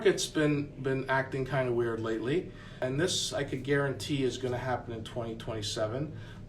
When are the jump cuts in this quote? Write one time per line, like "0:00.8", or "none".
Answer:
0:02.8